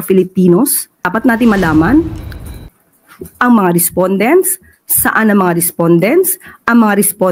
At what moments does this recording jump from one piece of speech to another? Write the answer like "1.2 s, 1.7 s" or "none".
1.1 s